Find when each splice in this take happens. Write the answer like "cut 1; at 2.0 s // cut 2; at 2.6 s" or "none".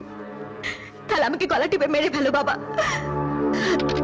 none